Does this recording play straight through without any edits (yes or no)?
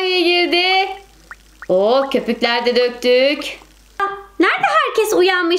no